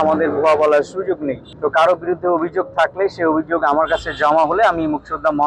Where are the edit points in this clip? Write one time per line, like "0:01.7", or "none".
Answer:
none